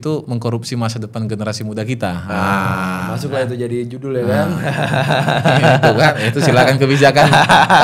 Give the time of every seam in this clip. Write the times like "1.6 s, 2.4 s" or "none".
none